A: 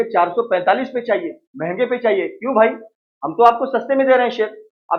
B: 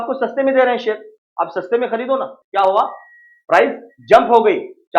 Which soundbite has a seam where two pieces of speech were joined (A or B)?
B